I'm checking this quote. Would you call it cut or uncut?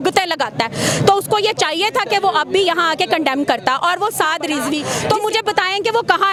uncut